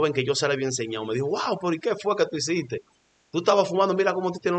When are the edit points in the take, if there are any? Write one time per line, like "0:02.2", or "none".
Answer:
none

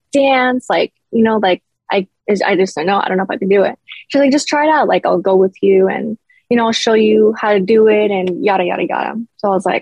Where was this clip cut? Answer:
none

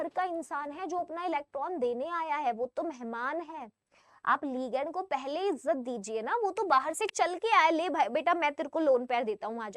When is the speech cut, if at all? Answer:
none

